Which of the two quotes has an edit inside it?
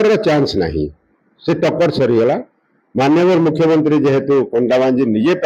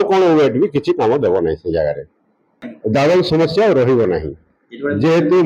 second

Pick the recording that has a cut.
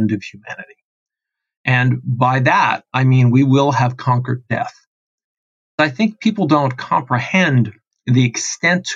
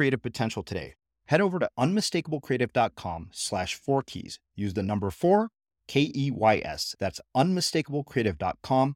first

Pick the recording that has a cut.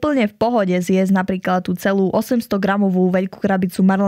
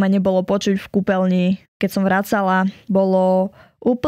second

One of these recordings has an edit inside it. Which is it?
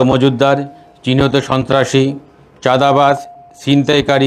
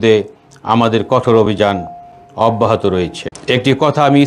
second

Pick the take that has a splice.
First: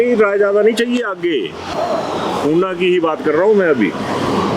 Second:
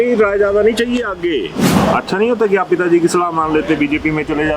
second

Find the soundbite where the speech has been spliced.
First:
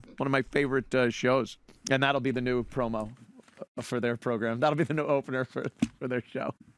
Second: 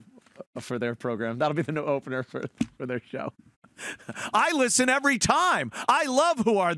first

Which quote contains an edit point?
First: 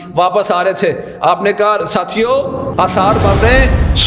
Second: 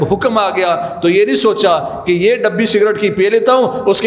first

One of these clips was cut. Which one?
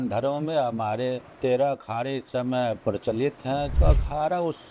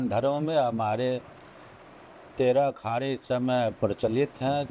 first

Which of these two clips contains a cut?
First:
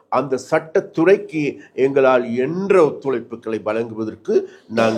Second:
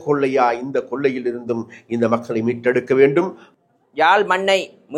second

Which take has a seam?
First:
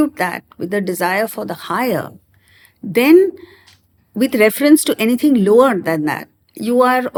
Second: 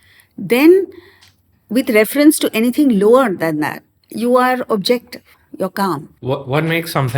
second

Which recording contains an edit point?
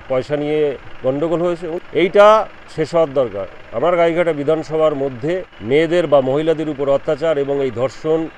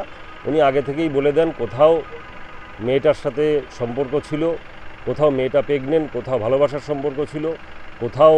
first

